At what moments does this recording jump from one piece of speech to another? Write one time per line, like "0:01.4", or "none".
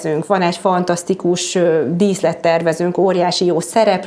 none